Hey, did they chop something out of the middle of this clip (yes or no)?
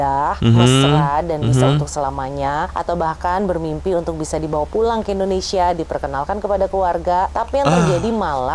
no